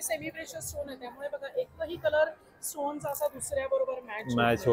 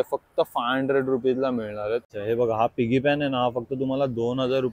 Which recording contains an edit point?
second; 1 cut; at 2.1 s

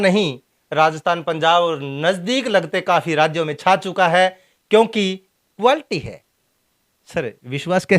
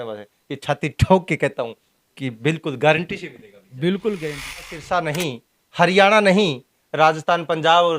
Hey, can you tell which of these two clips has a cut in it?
second; 1 cut; at 4.8 s

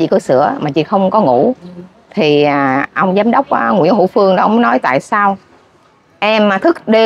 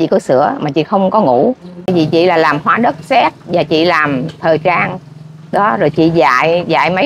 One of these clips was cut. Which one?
second; 1 cut; at 1.9 s

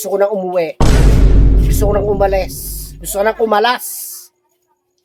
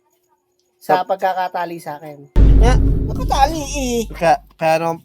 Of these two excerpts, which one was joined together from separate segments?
second; 1 cut; at 2.4 s

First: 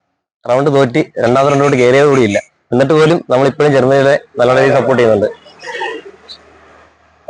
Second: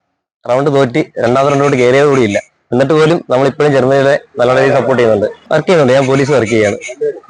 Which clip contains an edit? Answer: second; 1 cut; at 5.4 s

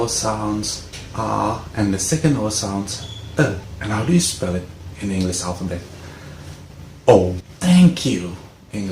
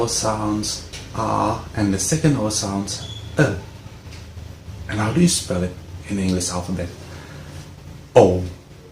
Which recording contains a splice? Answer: first; 2 cuts; at 3.7 s, 7.5 s

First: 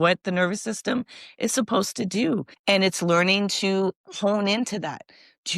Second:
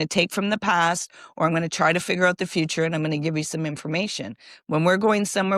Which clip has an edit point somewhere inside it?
first; 2 cuts; at 2.5 s, 4.1 s

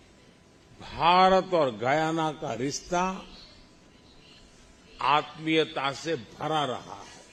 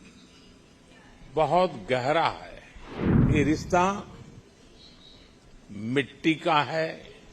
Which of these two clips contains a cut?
second; 1 cut; at 3.3 s

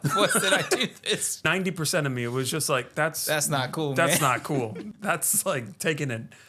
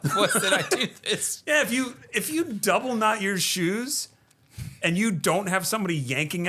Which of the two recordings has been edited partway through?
first; 2 cuts; at 1.5 s, 4.8 s

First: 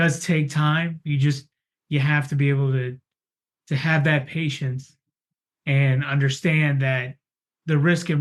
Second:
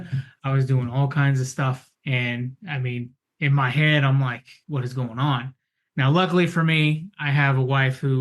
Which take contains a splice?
second; 1 cut; at 4.5 s

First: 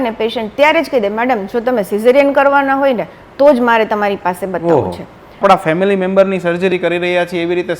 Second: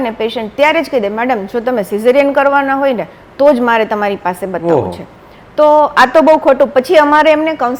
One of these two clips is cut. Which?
first; 1 cut; at 5.4 s

